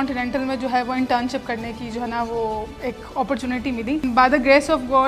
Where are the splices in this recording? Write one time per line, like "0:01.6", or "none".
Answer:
0:04.0